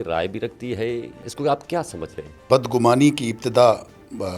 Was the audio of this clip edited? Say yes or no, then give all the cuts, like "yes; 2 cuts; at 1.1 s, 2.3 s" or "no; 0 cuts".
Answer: yes; 2 cuts; at 1.3 s, 2.5 s